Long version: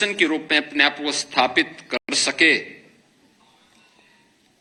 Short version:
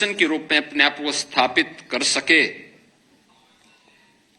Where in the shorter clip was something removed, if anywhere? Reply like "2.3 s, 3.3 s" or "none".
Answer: 2.0 s